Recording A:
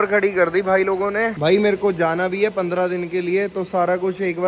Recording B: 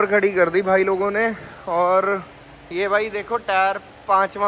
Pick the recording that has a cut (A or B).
A